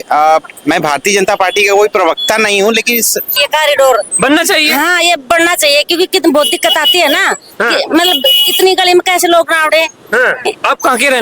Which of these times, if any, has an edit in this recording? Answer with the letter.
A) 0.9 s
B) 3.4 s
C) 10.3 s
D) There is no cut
B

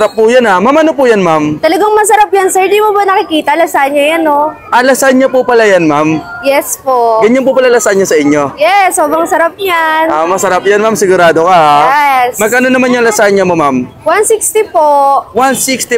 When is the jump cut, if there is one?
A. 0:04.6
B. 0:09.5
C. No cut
C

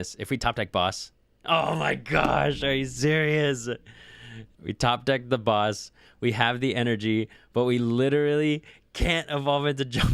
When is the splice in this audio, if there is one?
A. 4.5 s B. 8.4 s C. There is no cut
A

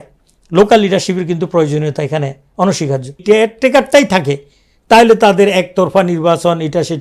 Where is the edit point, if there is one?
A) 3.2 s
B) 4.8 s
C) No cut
A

